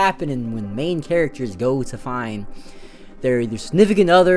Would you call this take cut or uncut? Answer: uncut